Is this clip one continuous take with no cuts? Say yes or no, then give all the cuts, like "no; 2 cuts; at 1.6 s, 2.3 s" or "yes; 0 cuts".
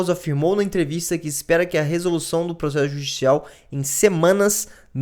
yes; 0 cuts